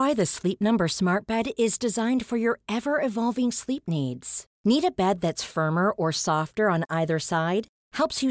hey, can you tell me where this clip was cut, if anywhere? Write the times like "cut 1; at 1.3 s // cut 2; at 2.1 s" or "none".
none